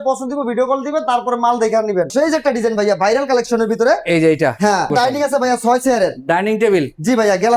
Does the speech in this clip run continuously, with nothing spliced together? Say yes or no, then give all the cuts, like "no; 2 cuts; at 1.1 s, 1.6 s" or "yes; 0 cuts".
no; 2 cuts; at 2.1 s, 4.9 s